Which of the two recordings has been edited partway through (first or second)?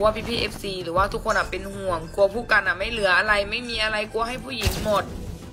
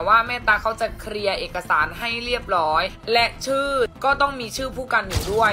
second